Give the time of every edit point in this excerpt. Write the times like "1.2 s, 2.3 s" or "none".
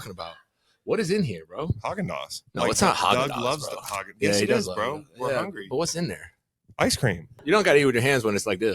7.3 s